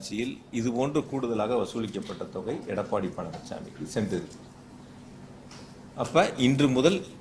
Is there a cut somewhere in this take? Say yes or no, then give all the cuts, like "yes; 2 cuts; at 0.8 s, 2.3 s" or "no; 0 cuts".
no; 0 cuts